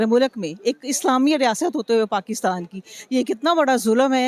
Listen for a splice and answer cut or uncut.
uncut